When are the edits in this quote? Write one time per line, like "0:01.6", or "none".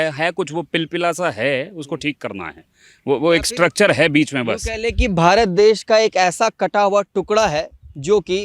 none

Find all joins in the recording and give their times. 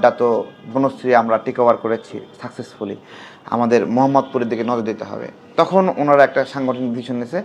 none

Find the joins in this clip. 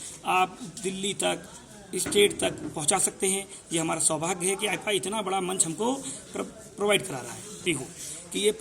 0:07.6

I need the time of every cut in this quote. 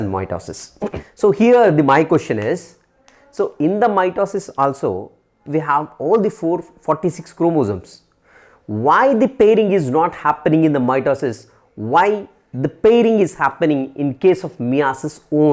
0:01.0

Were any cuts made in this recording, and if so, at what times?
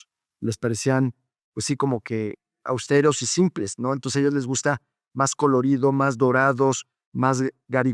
none

